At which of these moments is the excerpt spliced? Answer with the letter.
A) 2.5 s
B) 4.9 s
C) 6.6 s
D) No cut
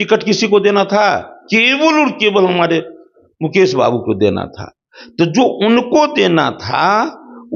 D